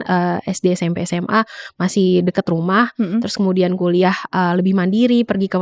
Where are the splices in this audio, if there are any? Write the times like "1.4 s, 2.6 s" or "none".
none